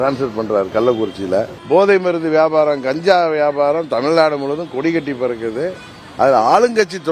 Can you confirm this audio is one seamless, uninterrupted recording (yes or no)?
no